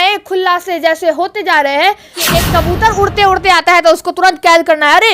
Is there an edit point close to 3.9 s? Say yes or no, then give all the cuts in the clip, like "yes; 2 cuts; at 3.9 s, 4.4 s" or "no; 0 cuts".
no; 1 cut; at 2.2 s